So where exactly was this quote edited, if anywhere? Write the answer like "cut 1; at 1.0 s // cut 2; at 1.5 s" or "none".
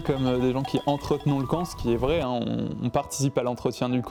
none